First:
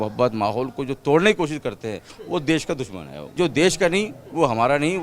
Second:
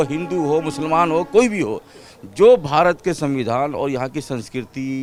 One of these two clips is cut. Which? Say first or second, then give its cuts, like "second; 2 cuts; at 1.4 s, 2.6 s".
first; 1 cut; at 3.3 s